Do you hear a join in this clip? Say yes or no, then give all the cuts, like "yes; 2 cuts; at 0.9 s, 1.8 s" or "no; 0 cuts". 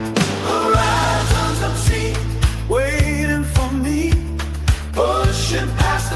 no; 0 cuts